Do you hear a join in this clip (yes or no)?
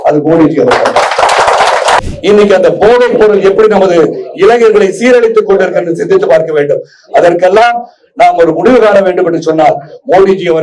yes